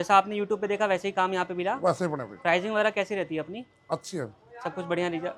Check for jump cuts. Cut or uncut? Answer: uncut